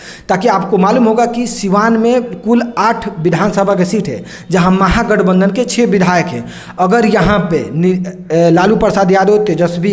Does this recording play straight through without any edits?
yes; 0 cuts

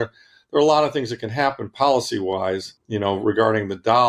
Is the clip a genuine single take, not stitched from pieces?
no; 1 cut; at 2.8 s

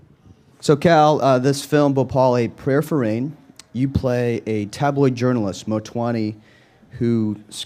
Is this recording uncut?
yes; 0 cuts

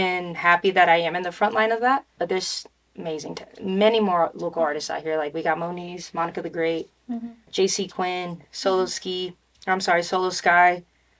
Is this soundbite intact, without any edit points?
yes; 0 cuts

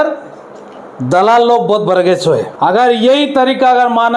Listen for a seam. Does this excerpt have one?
yes; 1 cut; at 2.5 s

